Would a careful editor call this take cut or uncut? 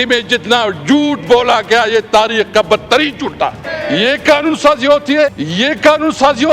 cut